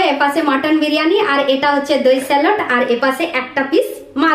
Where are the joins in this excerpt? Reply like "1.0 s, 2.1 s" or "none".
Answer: none